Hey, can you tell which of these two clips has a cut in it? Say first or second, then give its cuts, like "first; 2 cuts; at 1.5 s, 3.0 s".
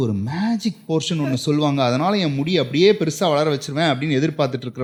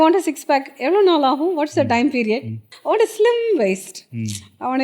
second; 1 cut; at 2.7 s